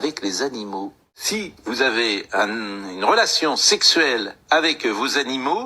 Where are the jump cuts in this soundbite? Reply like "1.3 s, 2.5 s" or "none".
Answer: 1.2 s